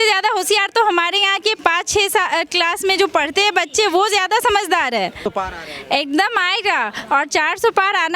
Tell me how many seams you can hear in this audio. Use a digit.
1